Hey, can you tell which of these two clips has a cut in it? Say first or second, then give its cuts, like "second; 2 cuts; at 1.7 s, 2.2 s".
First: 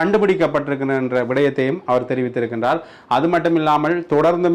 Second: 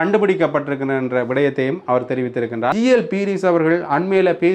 second; 1 cut; at 2.7 s